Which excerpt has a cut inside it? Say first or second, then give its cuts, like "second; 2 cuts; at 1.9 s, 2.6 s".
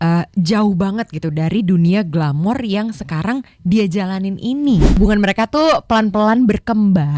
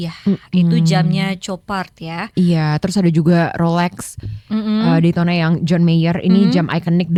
first; 1 cut; at 5.0 s